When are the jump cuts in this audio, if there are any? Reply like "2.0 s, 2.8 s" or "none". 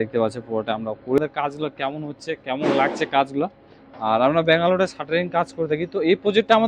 1.2 s